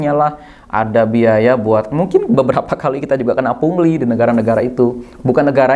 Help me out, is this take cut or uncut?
uncut